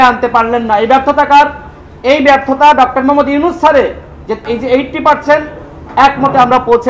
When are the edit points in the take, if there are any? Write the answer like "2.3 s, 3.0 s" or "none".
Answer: 4.4 s